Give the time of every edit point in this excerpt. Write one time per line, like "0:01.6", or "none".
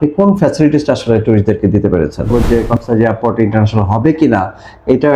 0:02.3